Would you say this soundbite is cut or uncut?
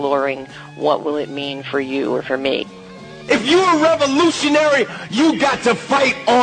cut